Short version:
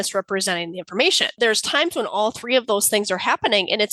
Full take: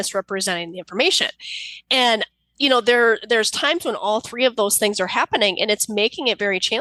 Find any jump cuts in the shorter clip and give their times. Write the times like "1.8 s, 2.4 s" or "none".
1.3 s